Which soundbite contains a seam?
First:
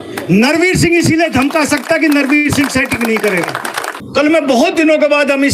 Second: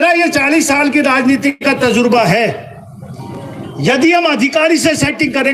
first; 1 cut; at 3.9 s

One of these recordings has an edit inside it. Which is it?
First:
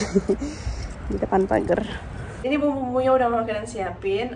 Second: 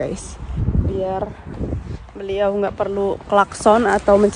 first; 1 cut; at 2.4 s

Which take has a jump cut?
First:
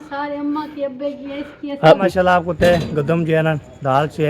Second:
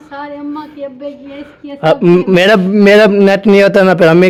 first; 1 cut; at 2.0 s

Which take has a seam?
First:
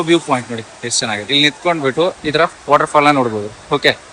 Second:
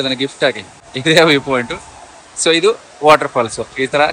second; 1 cut; at 0.9 s

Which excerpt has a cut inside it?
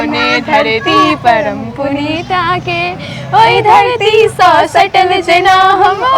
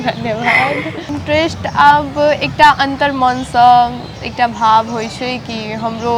second; 1 cut; at 0.9 s

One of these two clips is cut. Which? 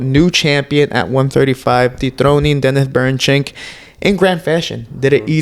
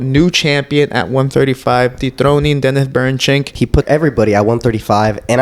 second; 1 cut; at 3.8 s

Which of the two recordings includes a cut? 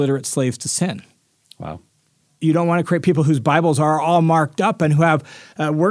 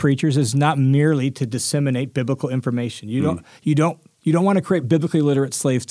first; 1 cut; at 2.3 s

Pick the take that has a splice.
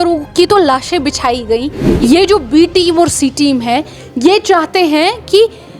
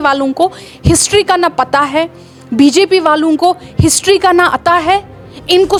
first; 1 cut; at 1.8 s

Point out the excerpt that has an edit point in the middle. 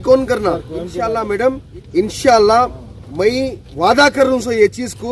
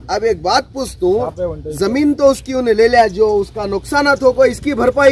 first; 1 cut; at 1.0 s

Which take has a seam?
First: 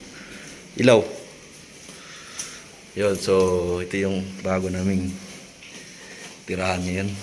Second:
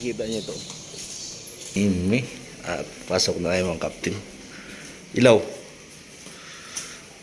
second; 1 cut; at 1.7 s

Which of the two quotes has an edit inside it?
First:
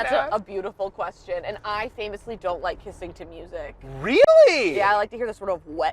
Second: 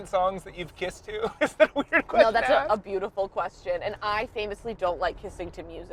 first; 1 cut; at 4.7 s

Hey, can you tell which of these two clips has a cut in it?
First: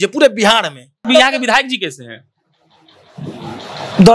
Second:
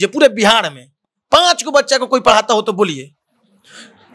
first; 1 cut; at 1.0 s

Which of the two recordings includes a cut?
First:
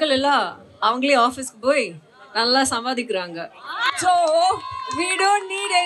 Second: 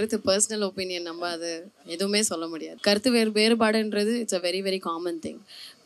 second; 1 cut; at 2.7 s

